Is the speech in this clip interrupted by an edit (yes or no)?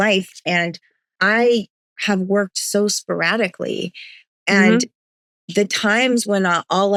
no